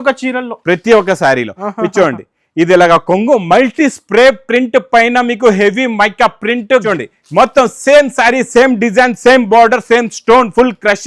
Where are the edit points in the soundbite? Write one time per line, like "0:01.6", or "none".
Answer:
0:06.8